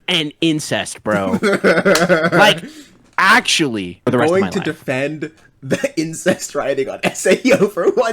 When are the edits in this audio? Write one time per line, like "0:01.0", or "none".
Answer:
0:04.0